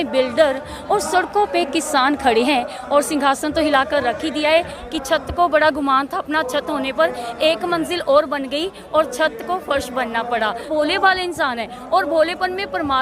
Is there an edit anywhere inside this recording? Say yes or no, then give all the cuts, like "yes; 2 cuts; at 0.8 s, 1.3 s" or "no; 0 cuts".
yes; 3 cuts; at 2.8 s, 4.8 s, 10.7 s